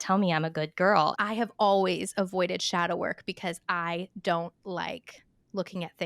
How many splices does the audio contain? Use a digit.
1